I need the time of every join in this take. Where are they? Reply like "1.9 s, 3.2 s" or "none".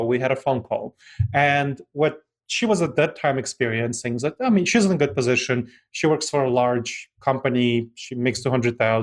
none